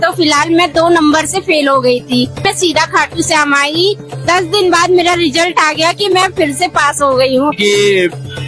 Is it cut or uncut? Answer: cut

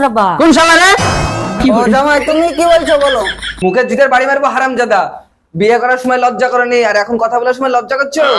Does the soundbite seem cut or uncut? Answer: cut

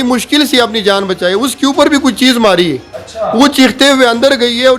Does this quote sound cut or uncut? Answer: uncut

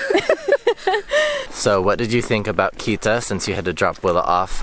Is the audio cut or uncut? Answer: cut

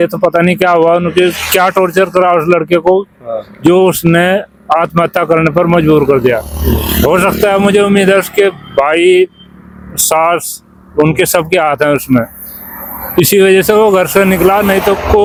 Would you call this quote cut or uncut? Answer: uncut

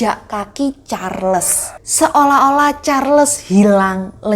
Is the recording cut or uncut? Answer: uncut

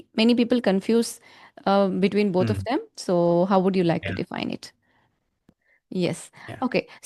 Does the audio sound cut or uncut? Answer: cut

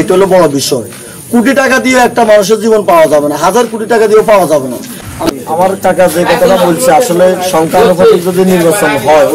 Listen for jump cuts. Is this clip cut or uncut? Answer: cut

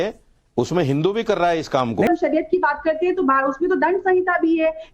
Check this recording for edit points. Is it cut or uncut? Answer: cut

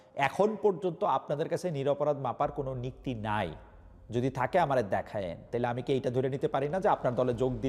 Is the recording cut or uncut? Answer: uncut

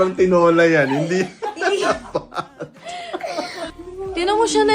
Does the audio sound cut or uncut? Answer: cut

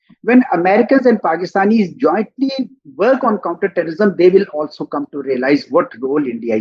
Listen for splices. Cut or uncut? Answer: uncut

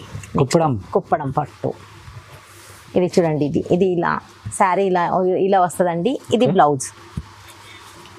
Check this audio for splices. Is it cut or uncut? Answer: uncut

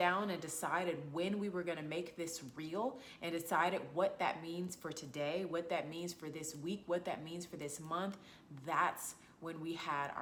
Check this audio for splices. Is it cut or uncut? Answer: uncut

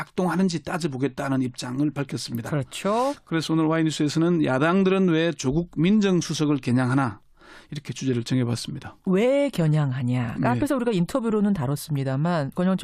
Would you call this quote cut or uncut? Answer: cut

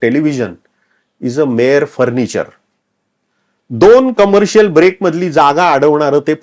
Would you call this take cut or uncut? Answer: uncut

